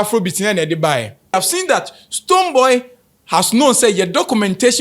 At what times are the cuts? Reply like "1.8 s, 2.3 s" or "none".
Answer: 1.3 s